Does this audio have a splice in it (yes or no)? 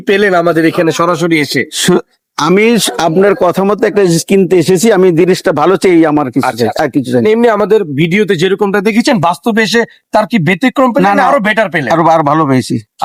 no